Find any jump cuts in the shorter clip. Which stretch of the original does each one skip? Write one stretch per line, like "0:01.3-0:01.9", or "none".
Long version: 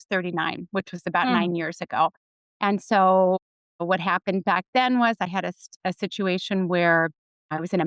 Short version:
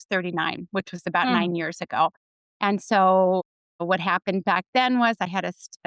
none